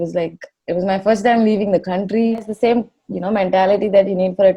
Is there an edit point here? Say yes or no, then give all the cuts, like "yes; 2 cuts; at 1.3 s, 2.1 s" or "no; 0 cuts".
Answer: yes; 1 cut; at 2.4 s